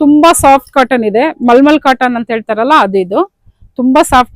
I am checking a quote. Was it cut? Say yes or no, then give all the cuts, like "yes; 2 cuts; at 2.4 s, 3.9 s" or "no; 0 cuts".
no; 0 cuts